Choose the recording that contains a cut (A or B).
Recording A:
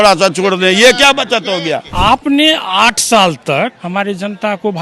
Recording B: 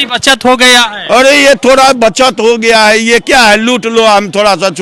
A